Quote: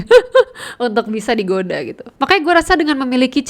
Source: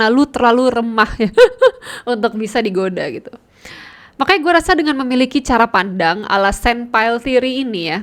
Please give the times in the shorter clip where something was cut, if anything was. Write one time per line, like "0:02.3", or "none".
0:02.0